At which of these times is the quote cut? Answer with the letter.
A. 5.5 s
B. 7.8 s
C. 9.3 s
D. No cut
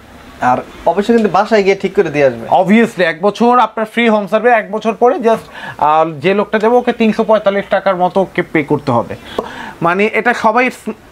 C